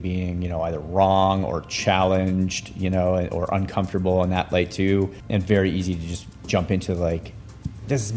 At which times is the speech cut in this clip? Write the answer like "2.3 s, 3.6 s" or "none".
5.2 s